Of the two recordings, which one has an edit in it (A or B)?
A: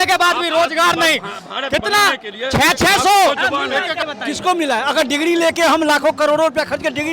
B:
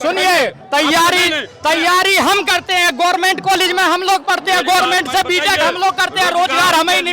A